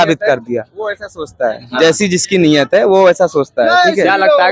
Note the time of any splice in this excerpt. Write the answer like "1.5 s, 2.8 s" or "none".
none